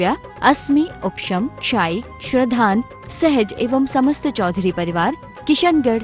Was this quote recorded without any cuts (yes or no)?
yes